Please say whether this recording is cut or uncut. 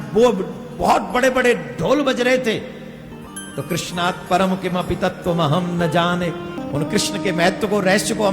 cut